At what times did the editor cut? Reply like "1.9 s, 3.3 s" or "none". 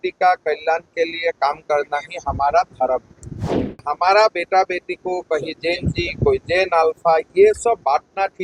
3.7 s